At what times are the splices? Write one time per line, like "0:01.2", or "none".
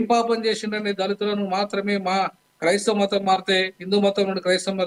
none